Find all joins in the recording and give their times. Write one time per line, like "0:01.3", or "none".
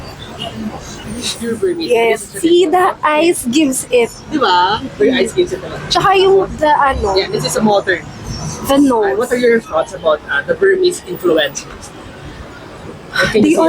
0:01.5
0:09.1